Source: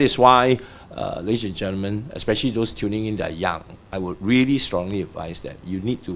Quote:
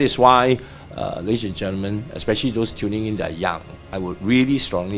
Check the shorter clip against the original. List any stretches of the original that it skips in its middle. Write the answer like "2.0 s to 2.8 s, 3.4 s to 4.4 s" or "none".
none